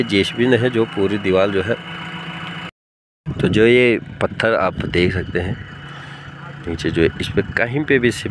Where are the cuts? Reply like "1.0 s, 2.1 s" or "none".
2.7 s